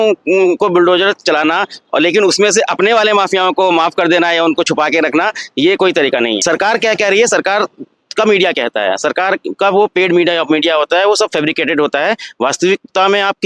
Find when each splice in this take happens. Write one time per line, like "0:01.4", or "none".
0:06.4

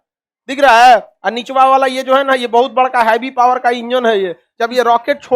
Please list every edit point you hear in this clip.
0:04.4

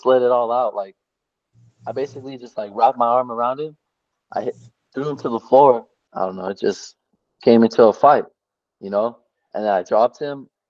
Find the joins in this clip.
0:06.0

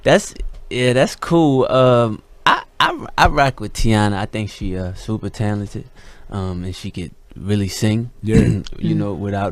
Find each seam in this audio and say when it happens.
0:07.2

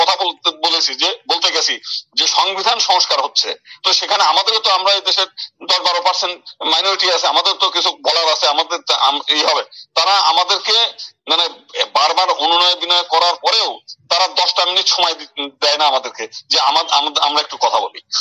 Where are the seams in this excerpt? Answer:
none

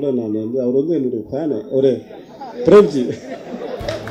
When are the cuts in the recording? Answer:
none

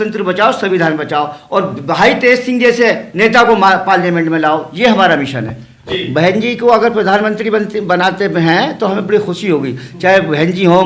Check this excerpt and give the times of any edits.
0:05.9

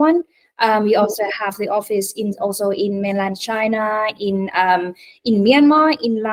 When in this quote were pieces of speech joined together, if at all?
none

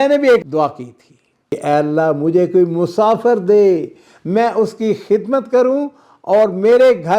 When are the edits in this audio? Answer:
0:01.5

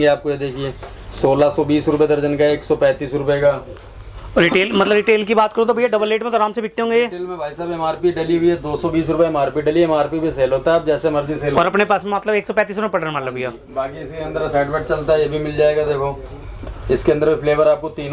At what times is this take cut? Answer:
none

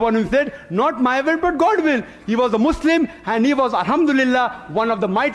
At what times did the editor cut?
none

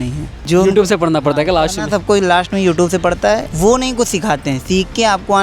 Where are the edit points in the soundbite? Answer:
0:03.5

